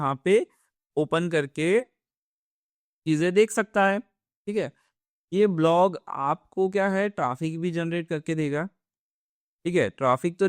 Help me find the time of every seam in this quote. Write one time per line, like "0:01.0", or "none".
none